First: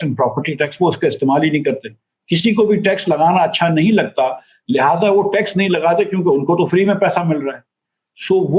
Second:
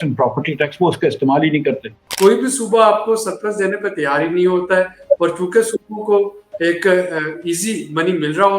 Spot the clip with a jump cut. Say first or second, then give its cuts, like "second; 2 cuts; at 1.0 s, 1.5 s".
second; 1 cut; at 2.0 s